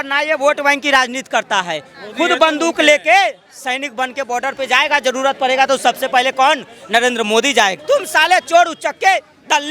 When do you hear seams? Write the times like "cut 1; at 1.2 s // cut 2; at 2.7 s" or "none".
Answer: cut 1; at 7.8 s